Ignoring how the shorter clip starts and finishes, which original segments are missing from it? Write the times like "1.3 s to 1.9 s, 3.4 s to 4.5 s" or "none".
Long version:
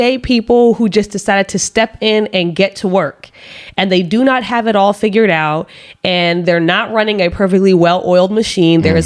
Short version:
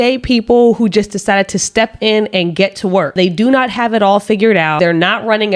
3.1 s to 3.9 s, 5.5 s to 6.4 s